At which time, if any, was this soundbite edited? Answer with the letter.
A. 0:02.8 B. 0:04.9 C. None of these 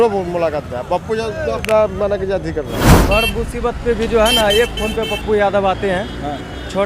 A